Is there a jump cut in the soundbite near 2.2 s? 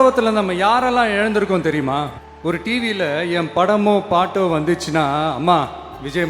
yes; 1 cut; at 2.2 s

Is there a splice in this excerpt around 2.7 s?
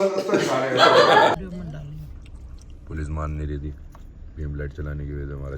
no; 1 cut; at 1.3 s

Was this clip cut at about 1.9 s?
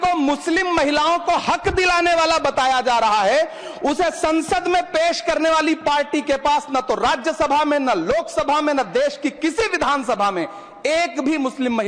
no; 0 cuts

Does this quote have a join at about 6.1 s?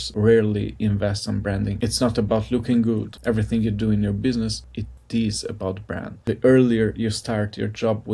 yes; 3 cuts; at 1.7 s, 3.1 s, 6.1 s

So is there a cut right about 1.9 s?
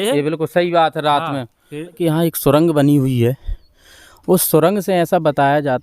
yes; 1 cut; at 1.9 s

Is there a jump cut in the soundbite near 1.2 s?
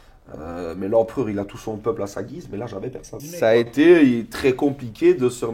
no; 1 cut; at 3.2 s

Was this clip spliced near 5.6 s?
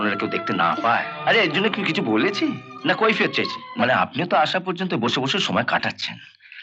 no; 2 cuts; at 1.1 s, 3.6 s

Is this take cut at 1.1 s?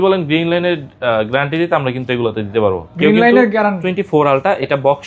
no; 1 cut; at 3.8 s

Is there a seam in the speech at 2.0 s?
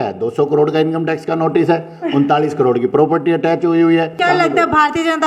no; 1 cut; at 4.2 s

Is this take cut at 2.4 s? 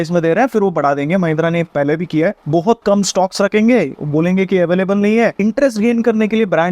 yes; 2 cuts; at 2.4 s, 5.4 s

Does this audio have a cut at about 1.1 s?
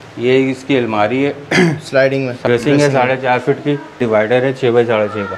no; 2 cuts; at 2.4 s, 4.0 s

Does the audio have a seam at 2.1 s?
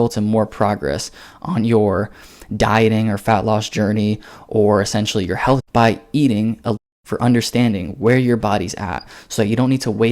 no; 2 cuts; at 5.6 s, 6.8 s

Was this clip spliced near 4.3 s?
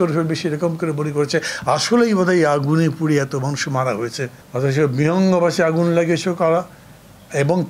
yes; 1 cut; at 4.3 s

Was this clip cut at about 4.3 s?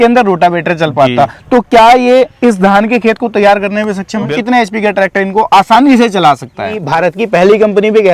yes; 2 cuts; at 4.3 s, 6.8 s

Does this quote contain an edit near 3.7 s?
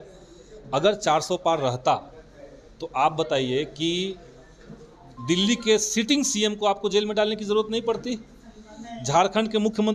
no; 0 cuts

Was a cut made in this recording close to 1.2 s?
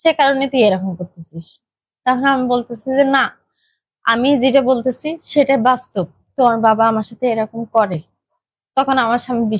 no; 0 cuts

